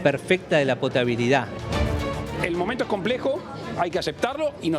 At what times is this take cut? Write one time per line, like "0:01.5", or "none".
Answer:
0:01.8